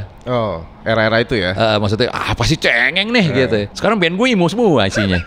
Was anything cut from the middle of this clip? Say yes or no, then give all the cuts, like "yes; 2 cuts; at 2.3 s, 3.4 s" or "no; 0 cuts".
yes; 1 cut; at 3.7 s